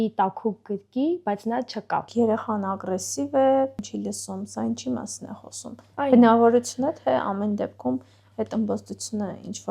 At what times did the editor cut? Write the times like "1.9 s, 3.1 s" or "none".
2.1 s, 3.8 s